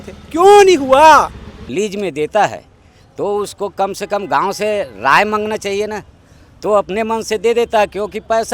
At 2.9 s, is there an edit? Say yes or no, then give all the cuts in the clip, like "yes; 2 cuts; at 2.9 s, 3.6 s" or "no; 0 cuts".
no; 1 cut; at 1.7 s